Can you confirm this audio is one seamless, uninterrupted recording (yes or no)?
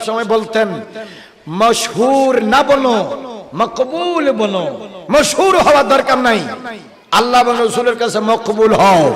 no